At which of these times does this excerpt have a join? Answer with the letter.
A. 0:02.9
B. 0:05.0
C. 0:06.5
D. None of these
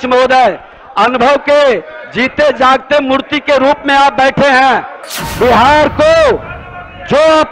B